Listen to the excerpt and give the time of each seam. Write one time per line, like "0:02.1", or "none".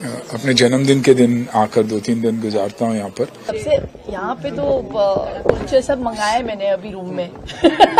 0:03.5